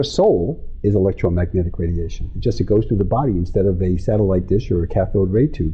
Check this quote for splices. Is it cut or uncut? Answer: uncut